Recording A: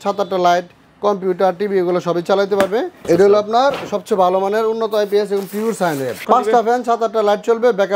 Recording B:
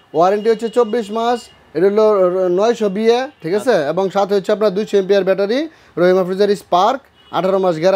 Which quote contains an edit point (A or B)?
A